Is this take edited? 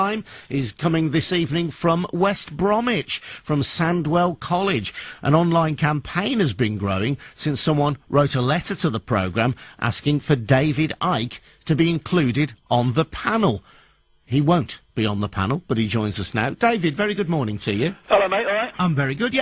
no; 0 cuts

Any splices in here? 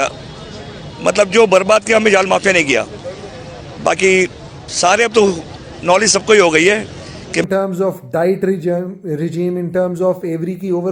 yes; 1 cut; at 7.4 s

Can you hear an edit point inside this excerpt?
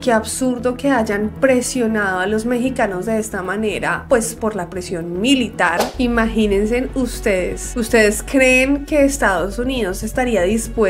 yes; 1 cut; at 5.9 s

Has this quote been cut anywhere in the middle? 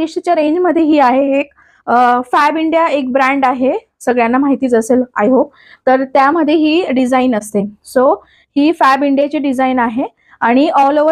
no; 0 cuts

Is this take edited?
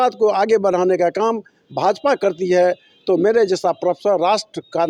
no; 0 cuts

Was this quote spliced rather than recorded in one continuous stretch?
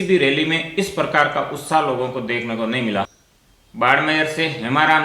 yes; 1 cut; at 3.1 s

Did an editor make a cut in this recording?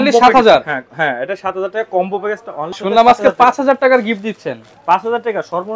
yes; 1 cut; at 2.8 s

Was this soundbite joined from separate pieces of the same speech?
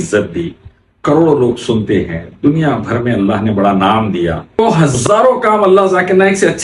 yes; 1 cut; at 4.6 s

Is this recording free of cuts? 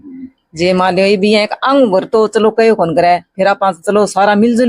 yes; 0 cuts

